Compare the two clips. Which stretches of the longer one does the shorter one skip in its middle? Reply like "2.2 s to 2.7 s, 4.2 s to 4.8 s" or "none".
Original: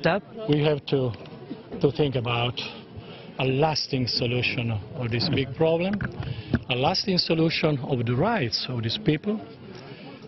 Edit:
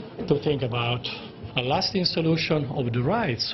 3.1 s to 6.7 s